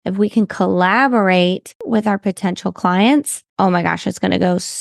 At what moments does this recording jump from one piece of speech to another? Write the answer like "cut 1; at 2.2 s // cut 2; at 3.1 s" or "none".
cut 1; at 1.8 s // cut 2; at 3.4 s